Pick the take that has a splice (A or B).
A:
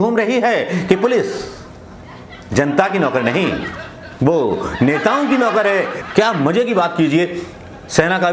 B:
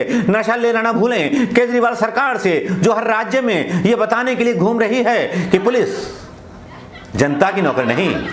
A